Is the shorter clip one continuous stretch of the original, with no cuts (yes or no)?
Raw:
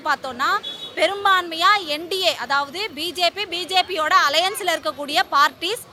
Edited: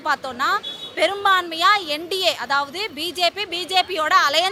yes